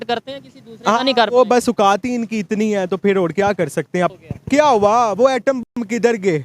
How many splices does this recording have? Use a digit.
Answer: 1